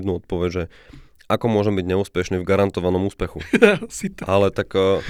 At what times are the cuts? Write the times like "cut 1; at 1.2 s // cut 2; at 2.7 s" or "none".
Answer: none

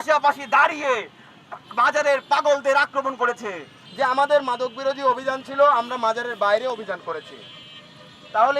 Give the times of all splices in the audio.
cut 1; at 3.8 s

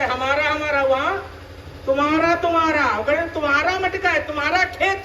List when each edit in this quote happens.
none

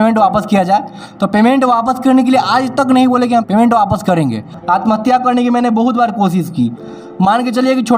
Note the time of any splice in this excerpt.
cut 1; at 3.5 s // cut 2; at 4.6 s

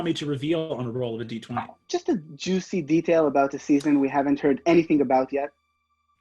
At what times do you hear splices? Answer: cut 1; at 1.8 s

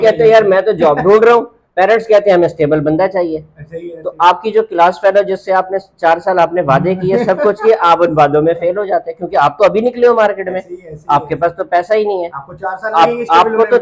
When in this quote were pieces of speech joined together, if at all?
none

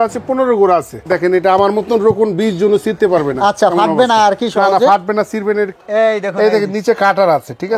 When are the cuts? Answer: cut 1; at 1.0 s // cut 2; at 5.8 s

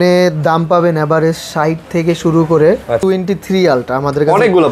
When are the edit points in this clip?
cut 1; at 3.0 s

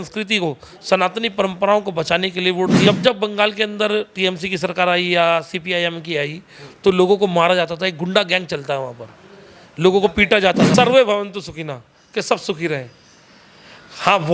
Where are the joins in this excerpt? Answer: cut 1; at 2.8 s // cut 2; at 10.7 s

